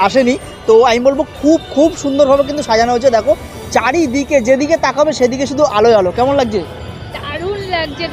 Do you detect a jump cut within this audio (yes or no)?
no